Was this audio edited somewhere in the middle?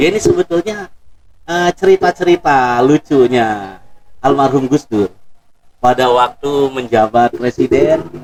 no; 0 cuts

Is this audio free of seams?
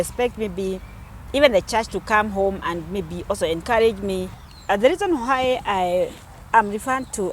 no; 1 cut; at 4.4 s

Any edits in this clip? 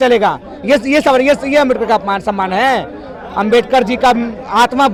no; 0 cuts

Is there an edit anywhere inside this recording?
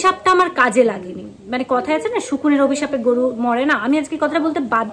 no; 0 cuts

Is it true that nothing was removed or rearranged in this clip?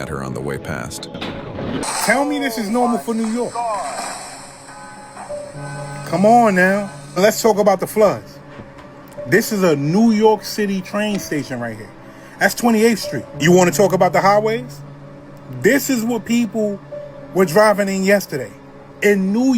no; 1 cut; at 1.8 s

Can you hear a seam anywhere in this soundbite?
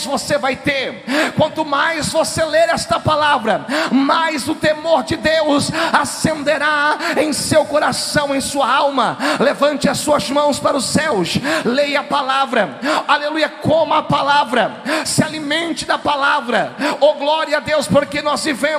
no; 0 cuts

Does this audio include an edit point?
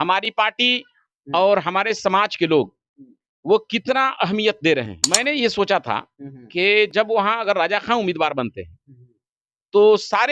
yes; 1 cut; at 5.0 s

